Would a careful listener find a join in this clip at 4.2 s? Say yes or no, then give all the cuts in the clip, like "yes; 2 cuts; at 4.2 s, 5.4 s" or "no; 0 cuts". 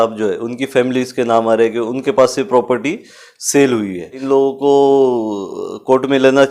yes; 1 cut; at 4.2 s